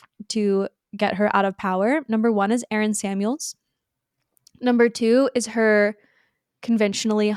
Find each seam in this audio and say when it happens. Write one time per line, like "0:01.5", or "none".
none